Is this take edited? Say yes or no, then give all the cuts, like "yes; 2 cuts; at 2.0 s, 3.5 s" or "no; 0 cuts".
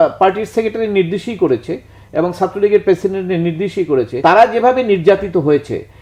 yes; 1 cut; at 4.1 s